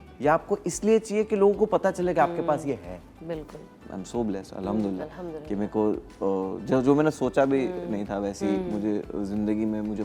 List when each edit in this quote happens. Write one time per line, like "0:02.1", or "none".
0:03.8